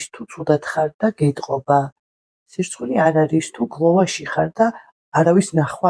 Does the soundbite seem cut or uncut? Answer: uncut